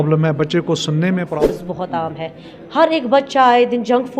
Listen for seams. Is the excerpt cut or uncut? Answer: cut